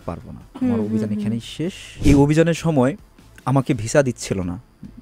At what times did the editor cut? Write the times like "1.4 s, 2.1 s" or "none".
1.8 s